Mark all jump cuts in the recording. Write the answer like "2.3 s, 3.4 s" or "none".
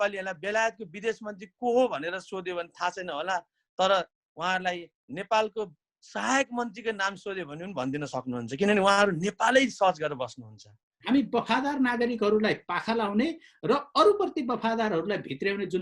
10.9 s